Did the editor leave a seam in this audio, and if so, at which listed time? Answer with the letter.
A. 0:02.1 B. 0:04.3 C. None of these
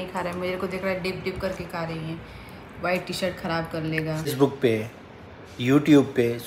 B